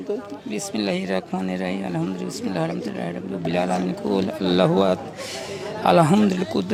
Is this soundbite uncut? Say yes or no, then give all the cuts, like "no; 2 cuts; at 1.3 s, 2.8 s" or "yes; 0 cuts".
yes; 0 cuts